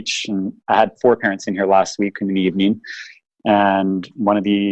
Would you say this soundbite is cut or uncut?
cut